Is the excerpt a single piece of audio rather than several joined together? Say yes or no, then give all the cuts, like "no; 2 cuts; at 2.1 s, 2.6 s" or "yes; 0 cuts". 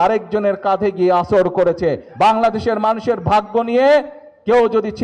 no; 1 cut; at 2.1 s